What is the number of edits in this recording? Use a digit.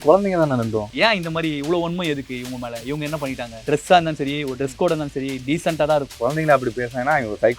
3